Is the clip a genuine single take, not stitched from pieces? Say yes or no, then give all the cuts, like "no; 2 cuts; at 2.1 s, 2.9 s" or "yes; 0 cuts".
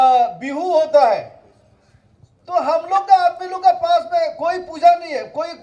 yes; 0 cuts